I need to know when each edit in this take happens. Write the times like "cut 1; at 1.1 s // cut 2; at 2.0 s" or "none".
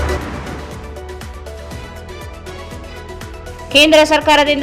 cut 1; at 2.8 s